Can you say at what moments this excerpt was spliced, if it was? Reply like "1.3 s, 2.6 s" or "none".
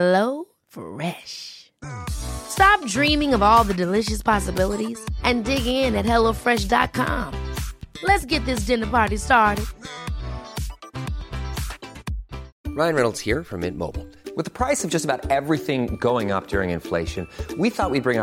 12.5 s